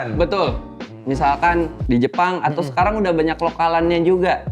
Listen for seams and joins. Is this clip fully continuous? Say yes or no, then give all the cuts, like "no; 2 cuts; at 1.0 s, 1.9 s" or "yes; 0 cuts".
no; 1 cut; at 1.8 s